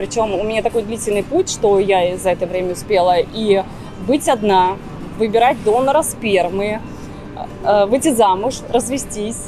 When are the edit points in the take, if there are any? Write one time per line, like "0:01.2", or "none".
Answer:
none